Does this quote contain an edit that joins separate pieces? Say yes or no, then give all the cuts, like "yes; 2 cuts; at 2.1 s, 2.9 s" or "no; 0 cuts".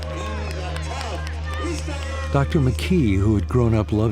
yes; 1 cut; at 2.3 s